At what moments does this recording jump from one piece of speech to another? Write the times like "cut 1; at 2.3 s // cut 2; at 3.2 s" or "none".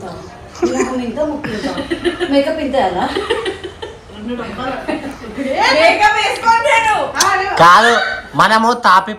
none